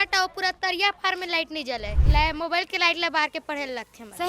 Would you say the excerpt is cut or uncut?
cut